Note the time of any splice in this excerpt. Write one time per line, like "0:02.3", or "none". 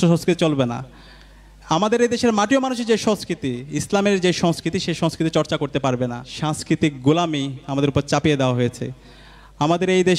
0:06.3